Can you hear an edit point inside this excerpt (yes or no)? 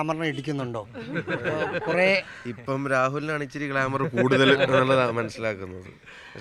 no